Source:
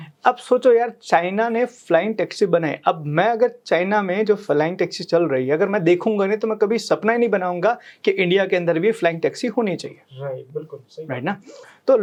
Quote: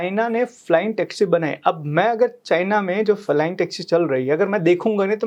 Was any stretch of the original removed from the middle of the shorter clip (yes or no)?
no